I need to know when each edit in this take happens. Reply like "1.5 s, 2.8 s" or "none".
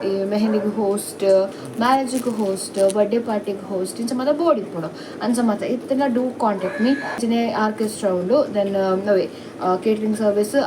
7.2 s